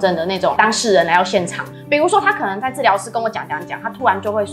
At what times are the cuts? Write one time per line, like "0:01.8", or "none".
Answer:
0:01.6